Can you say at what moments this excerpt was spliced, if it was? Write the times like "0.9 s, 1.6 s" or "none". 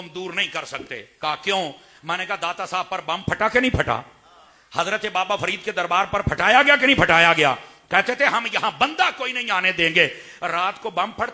none